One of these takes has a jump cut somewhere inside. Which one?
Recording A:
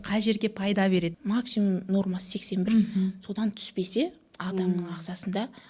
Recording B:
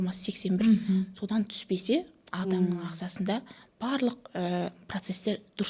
A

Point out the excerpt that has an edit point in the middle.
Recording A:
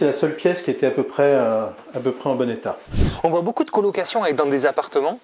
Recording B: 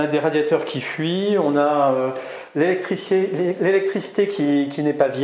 A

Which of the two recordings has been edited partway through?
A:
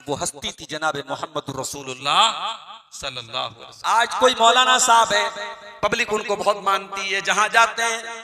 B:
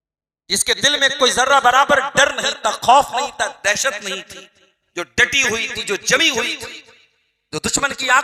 A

